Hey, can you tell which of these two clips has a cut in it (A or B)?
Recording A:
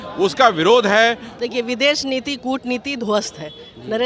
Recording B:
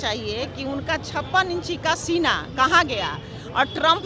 A